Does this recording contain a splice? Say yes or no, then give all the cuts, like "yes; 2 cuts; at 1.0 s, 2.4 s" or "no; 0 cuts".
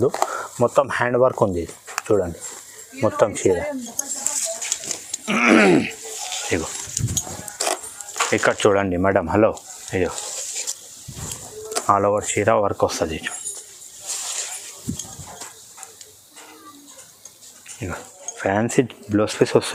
no; 0 cuts